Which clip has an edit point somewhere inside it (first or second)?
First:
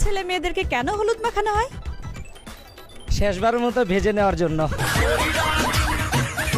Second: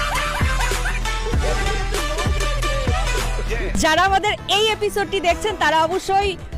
second